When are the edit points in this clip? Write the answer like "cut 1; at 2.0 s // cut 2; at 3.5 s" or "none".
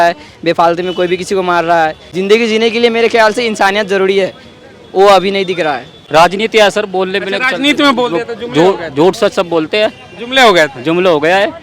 cut 1; at 2.0 s // cut 2; at 5.9 s